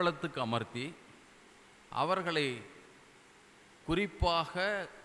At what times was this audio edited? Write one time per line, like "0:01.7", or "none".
none

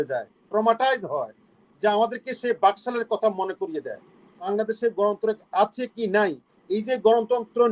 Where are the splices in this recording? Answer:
0:04.5

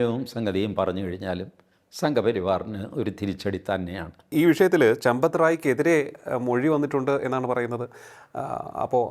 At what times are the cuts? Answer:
none

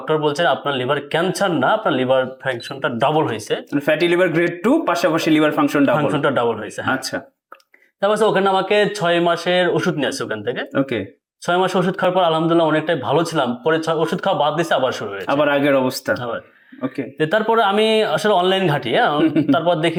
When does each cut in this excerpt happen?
none

